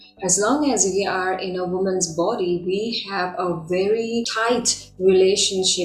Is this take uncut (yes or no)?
no